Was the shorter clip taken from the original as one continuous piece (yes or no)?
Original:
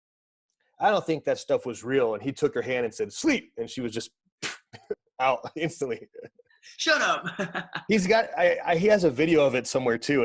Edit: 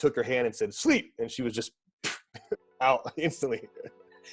yes